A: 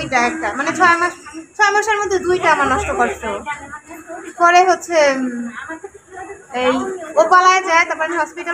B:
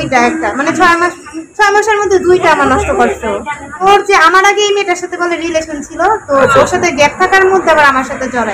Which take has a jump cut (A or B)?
B